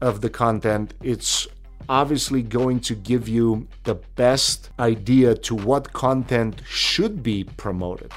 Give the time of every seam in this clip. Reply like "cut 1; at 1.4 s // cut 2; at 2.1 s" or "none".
cut 1; at 4.6 s